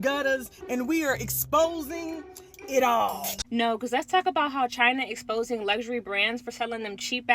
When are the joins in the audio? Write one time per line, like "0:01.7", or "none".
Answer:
0:03.3